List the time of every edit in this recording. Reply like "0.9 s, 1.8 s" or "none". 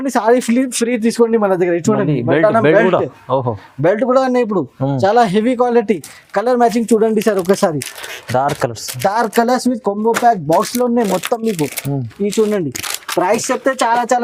none

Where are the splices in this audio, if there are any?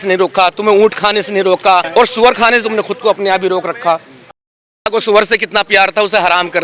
1.9 s

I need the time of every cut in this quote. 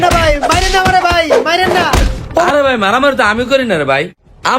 2.5 s

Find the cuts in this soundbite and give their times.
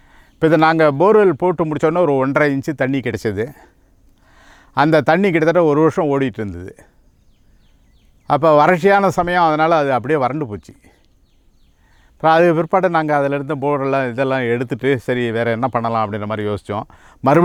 none

